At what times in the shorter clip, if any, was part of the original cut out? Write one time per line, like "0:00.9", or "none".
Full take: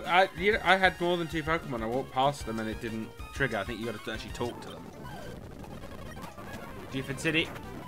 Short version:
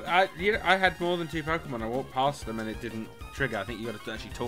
none